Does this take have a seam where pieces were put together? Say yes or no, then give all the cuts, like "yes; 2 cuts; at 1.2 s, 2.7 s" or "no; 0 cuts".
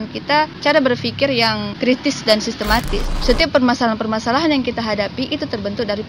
yes; 1 cut; at 3.0 s